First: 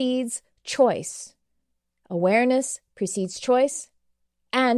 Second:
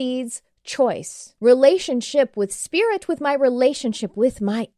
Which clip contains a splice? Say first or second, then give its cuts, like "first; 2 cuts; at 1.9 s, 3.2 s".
second; 1 cut; at 1.2 s